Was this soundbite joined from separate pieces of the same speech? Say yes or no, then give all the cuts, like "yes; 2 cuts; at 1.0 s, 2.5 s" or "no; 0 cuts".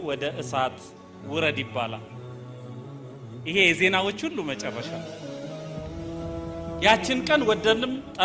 yes; 2 cuts; at 4.8 s, 6.5 s